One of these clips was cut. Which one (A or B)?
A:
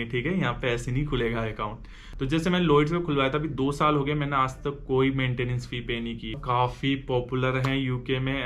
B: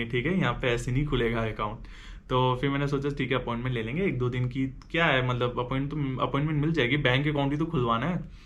A